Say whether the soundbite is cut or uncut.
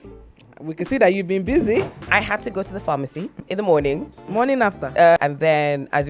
cut